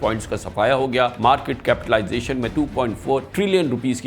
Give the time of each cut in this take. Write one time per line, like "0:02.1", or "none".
0:01.1
0:02.5